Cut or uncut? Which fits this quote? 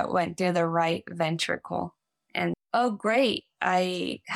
cut